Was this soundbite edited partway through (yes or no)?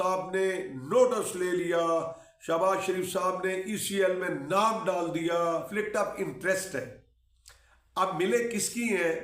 yes